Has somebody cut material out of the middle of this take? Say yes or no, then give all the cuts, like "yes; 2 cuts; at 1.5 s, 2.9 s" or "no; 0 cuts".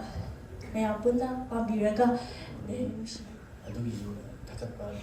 yes; 1 cut; at 3.0 s